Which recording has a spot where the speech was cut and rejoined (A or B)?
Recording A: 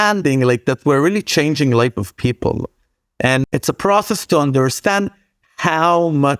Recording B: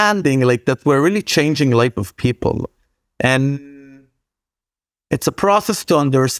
A